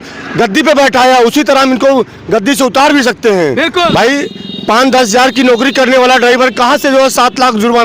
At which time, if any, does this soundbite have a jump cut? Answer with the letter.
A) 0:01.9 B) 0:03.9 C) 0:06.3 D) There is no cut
B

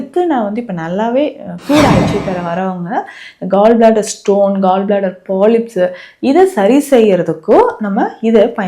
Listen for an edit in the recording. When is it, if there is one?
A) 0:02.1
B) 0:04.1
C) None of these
A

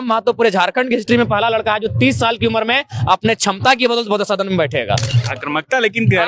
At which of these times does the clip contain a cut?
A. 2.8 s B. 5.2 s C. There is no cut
B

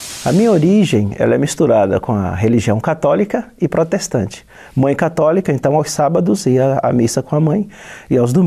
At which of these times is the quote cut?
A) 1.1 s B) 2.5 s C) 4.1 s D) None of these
A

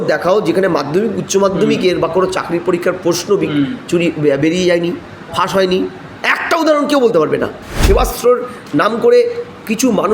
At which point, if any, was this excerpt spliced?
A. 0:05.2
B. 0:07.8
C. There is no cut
B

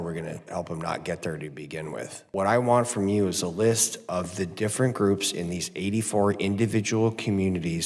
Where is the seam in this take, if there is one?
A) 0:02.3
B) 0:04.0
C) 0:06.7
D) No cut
A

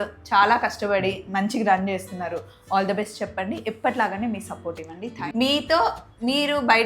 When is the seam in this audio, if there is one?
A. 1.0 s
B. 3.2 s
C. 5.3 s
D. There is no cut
C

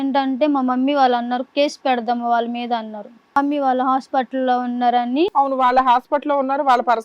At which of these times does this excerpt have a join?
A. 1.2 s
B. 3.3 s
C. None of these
B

